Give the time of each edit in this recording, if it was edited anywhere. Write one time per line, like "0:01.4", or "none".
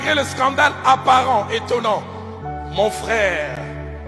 0:02.5